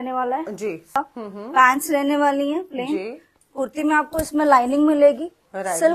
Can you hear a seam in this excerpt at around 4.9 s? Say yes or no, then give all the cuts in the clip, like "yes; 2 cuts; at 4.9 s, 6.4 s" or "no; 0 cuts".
no; 1 cut; at 1.0 s